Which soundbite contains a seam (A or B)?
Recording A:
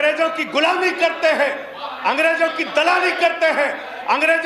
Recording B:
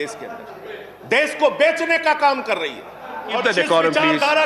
B